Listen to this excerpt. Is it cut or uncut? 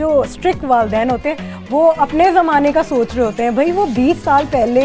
uncut